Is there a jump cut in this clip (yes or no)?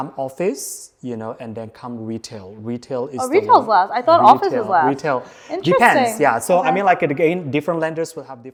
no